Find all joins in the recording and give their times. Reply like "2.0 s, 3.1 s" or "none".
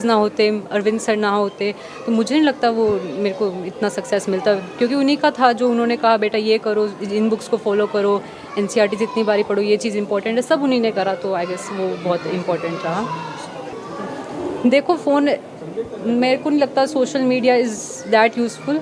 13.7 s